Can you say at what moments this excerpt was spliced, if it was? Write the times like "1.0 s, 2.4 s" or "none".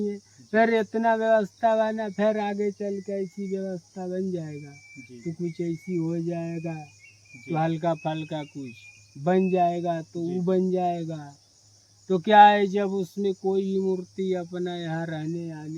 none